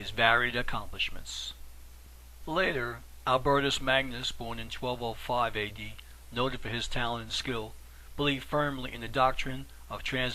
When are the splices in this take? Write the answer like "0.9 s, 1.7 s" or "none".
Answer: 6.2 s